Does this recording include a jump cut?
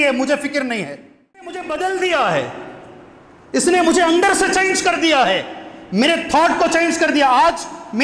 yes; 1 cut; at 1.5 s

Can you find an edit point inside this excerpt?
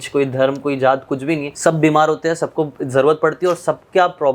yes; 2 cuts; at 1.5 s, 2.8 s

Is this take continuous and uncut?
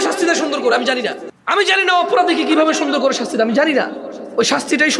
no; 1 cut; at 1.3 s

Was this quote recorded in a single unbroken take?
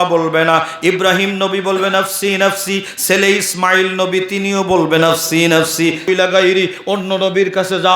no; 1 cut; at 6.1 s

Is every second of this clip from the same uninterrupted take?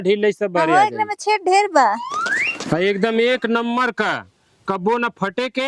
no; 1 cut; at 2.0 s

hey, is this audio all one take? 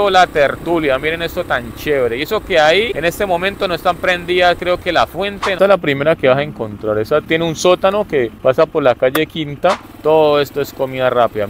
no; 5 cuts; at 2.9 s, 5.6 s, 7.3 s, 8.3 s, 9.9 s

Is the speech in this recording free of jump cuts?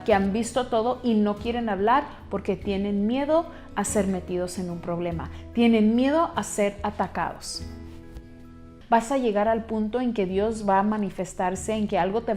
no; 1 cut; at 8.7 s

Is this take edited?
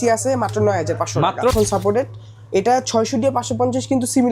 yes; 1 cut; at 1.5 s

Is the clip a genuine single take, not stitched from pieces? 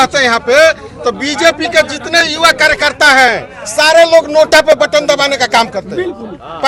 yes; 0 cuts

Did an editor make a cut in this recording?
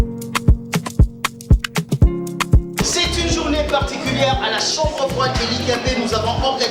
no; 0 cuts

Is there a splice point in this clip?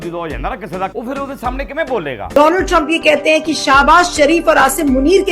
yes; 2 cuts; at 0.9 s, 2.3 s

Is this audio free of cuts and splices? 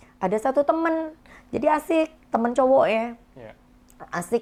yes; 0 cuts

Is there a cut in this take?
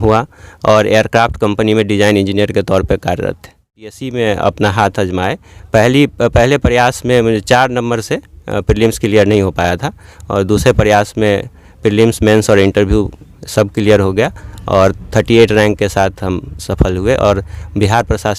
yes; 1 cut; at 4.0 s

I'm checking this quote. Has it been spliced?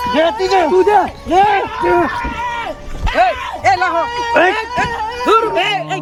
no; 0 cuts

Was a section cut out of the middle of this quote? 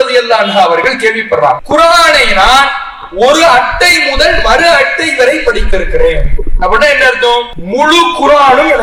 yes; 2 cuts; at 1.6 s, 7.6 s

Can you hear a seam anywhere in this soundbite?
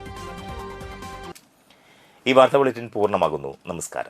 no; 0 cuts

